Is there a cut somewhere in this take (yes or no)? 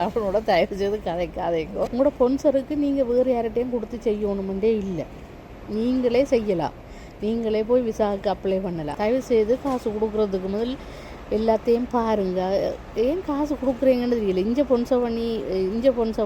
yes